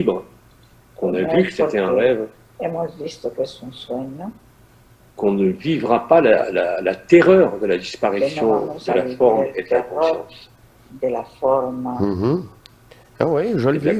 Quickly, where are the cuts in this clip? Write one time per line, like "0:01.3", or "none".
none